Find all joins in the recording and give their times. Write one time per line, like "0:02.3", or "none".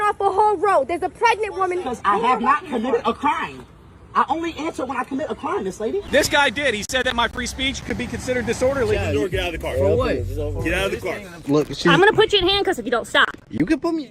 0:01.9
0:06.1
0:09.0
0:11.3

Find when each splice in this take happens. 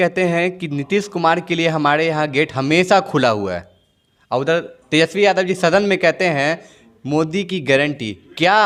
none

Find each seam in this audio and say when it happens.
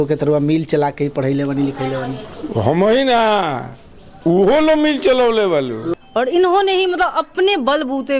0:05.9

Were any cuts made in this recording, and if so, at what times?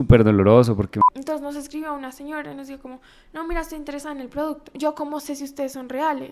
0:01.0
0:04.7

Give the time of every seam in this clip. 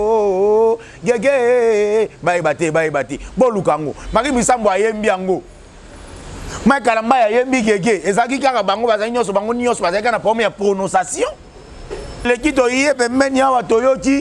0:12.2

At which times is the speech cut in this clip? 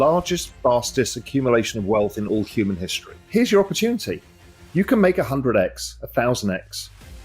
0:03.2

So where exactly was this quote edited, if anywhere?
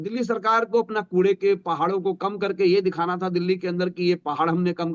none

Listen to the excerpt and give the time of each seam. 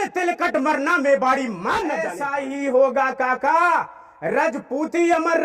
0:02.2

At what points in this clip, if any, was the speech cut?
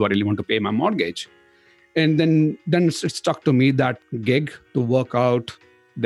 0:04.1

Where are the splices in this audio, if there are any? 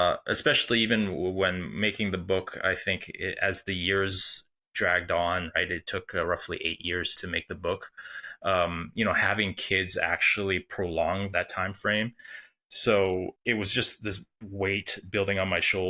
0:07.1
0:11.3
0:13.3

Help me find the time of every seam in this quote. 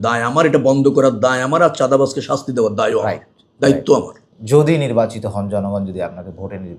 none

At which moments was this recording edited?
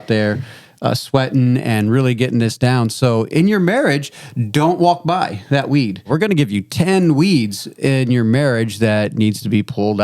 0:06.1

